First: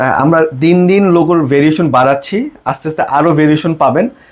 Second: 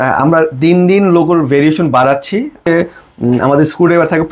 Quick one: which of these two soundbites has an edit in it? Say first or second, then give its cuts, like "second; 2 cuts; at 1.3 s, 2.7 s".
second; 1 cut; at 2.7 s